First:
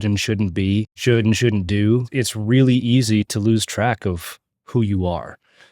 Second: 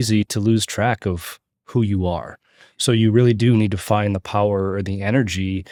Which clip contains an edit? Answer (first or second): first